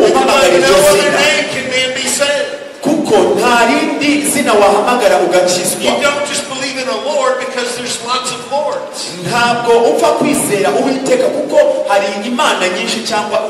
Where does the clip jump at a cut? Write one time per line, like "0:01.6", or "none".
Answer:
none